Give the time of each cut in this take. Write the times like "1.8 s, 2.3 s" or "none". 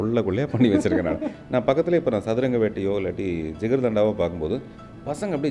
none